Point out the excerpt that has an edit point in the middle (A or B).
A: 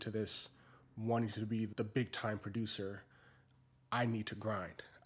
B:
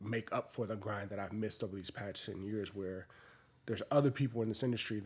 A